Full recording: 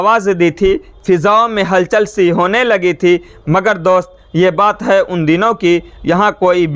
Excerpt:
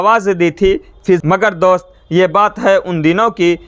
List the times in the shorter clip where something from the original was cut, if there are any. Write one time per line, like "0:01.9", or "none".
0:01.2